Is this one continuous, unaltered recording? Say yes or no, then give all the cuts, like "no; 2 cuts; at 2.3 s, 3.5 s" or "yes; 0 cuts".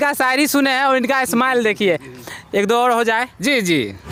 yes; 0 cuts